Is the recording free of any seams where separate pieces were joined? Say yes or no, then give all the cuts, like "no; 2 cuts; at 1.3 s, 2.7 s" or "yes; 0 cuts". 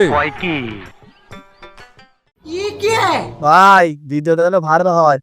no; 1 cut; at 2.6 s